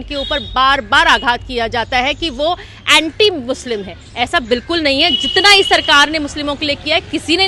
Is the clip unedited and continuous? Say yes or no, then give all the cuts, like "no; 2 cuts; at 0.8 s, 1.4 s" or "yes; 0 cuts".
yes; 0 cuts